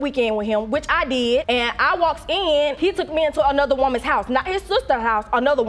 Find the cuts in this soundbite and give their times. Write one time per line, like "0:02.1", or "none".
none